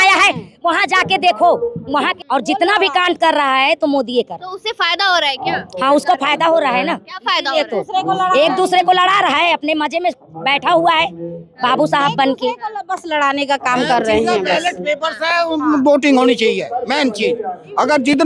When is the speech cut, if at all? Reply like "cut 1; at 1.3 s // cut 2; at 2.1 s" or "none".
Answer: cut 1; at 2.1 s